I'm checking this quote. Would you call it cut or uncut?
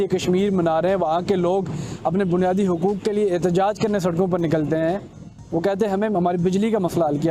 uncut